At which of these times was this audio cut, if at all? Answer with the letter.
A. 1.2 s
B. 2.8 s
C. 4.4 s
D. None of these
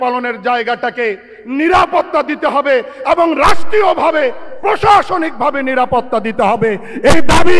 D